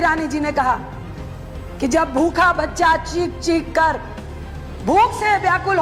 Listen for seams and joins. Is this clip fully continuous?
yes; 0 cuts

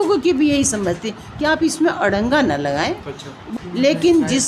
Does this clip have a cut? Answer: yes; 1 cut; at 3.4 s

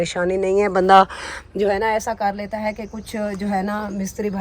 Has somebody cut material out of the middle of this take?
no; 0 cuts

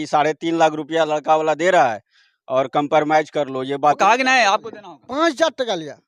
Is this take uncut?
no; 1 cut; at 4.0 s

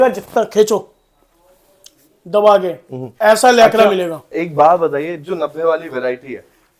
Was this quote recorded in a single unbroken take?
yes; 0 cuts

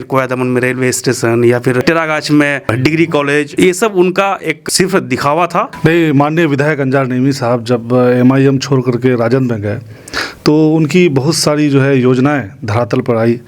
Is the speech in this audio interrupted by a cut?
yes; 1 cut; at 5.7 s

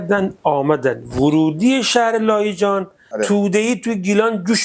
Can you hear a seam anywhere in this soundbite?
yes; 1 cut; at 3.0 s

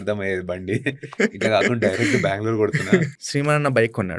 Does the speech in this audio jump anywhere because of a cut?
yes; 1 cut; at 3.2 s

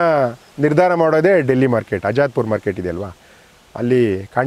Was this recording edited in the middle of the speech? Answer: no; 0 cuts

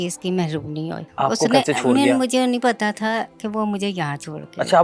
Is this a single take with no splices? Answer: no; 1 cut; at 1.0 s

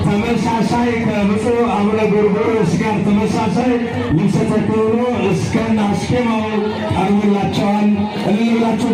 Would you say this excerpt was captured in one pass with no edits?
yes; 0 cuts

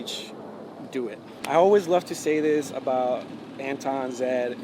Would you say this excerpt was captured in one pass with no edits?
no; 1 cut; at 1.3 s

